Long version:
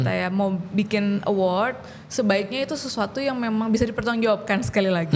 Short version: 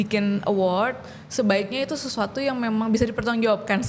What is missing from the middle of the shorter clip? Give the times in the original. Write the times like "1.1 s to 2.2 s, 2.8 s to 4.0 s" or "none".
none